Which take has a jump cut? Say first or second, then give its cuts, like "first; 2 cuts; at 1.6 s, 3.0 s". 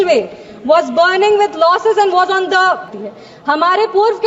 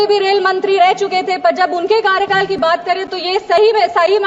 first; 1 cut; at 3.0 s